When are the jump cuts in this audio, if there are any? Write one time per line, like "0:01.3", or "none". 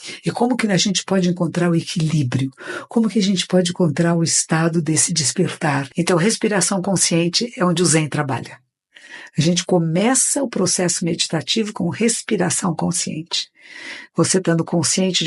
0:05.9